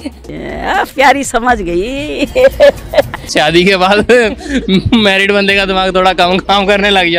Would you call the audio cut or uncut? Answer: cut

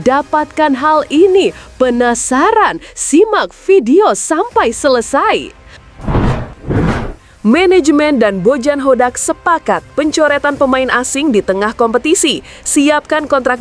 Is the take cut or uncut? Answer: cut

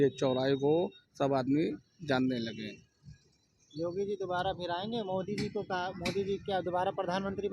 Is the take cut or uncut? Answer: uncut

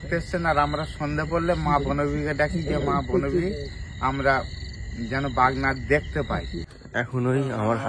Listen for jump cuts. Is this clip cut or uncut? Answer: cut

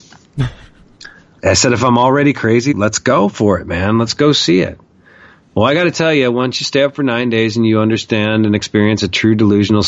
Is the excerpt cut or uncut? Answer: cut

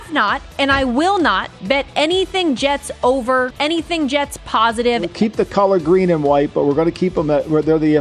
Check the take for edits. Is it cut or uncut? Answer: cut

